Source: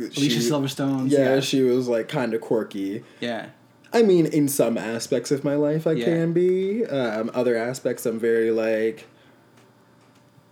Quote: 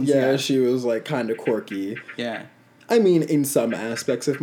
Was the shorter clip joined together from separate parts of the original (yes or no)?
no